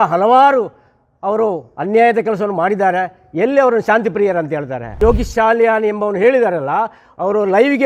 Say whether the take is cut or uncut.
cut